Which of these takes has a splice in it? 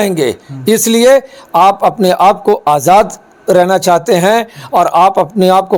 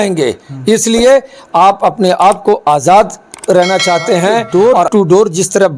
second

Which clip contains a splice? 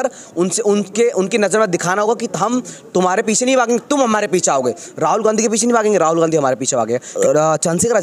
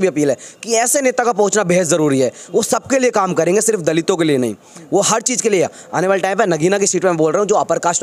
first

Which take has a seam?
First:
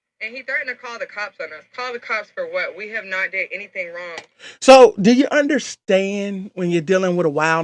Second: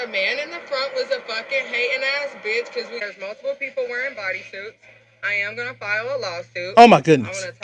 second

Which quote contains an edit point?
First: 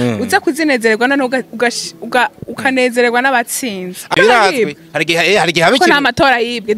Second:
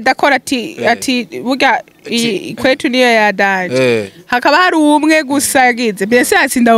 first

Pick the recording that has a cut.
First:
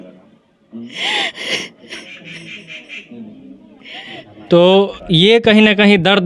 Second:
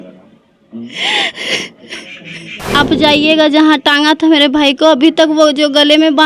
second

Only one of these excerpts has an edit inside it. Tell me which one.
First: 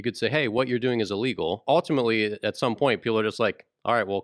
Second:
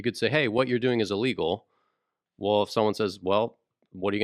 first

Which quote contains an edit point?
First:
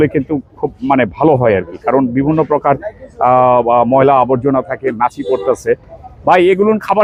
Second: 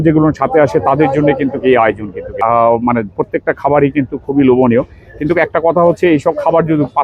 second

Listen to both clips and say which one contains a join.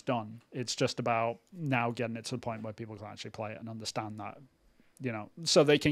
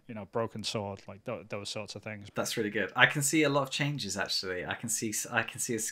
second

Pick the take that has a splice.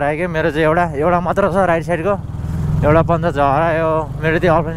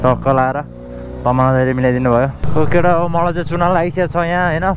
second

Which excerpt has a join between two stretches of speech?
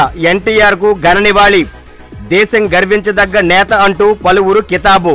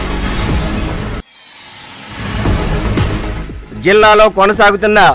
second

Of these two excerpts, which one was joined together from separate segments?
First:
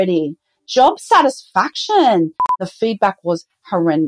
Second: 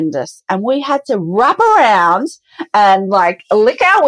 first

